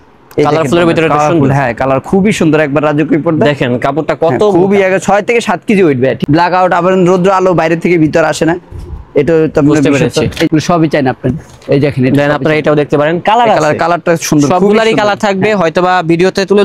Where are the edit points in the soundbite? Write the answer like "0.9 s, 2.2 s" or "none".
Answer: 6.2 s, 10.5 s